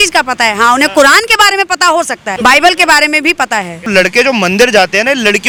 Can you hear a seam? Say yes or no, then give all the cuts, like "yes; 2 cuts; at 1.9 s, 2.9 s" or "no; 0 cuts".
no; 0 cuts